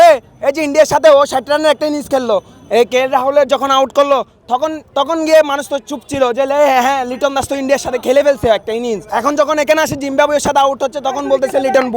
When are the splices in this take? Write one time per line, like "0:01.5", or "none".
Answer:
0:09.0